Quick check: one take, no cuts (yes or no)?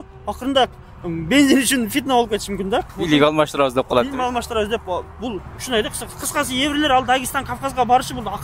no